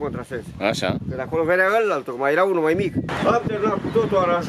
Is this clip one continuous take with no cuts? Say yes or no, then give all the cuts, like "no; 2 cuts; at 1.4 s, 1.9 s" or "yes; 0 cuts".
no; 1 cut; at 3.1 s